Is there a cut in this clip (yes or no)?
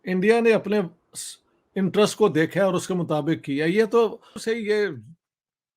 yes